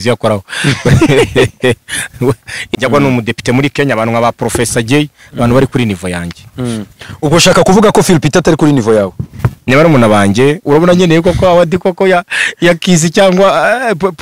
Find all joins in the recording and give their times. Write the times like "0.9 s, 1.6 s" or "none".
2.5 s, 10.6 s